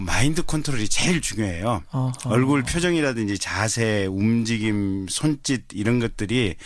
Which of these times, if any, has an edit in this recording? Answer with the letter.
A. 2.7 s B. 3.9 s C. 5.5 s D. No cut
A